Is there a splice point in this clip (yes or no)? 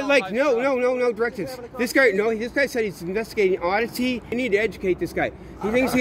yes